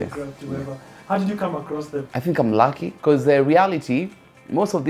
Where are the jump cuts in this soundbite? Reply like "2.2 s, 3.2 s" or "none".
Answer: 2.1 s, 2.9 s